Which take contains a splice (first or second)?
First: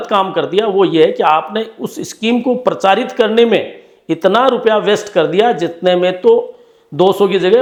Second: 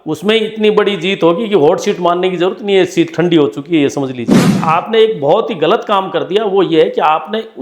second